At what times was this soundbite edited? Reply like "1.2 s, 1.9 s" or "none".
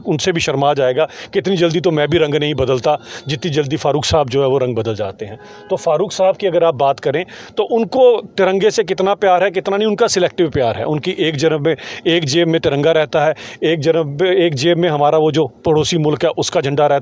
none